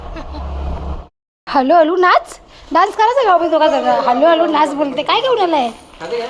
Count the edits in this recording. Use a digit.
1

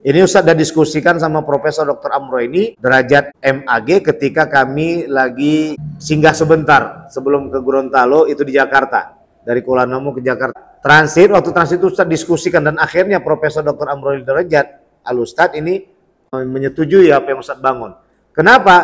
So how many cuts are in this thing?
2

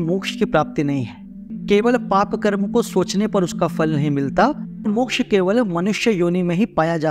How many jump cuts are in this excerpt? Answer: 2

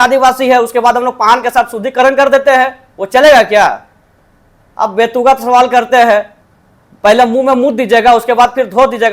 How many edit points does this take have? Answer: 0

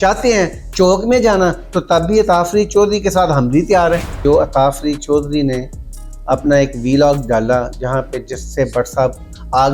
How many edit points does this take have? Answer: 1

